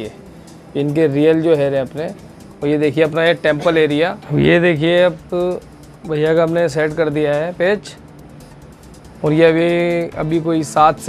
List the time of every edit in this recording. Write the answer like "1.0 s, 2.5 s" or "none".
4.2 s